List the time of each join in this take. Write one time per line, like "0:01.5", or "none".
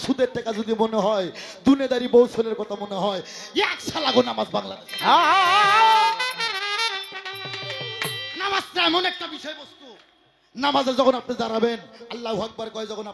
none